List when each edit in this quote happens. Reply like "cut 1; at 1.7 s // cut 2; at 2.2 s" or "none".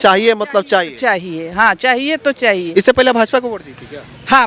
cut 1; at 2.6 s